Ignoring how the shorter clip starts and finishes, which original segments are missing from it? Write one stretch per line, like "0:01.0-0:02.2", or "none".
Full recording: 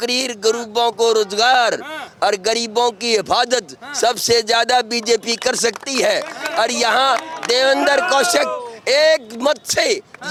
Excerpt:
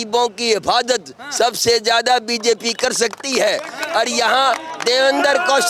none